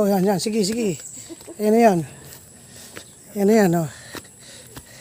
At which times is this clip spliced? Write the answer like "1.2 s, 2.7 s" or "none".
none